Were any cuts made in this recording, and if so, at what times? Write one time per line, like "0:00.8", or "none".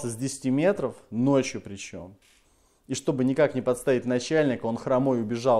none